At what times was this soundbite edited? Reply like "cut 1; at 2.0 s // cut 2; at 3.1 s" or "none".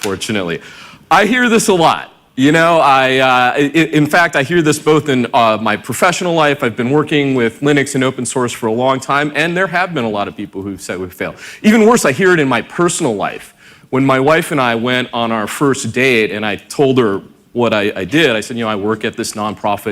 cut 1; at 14.5 s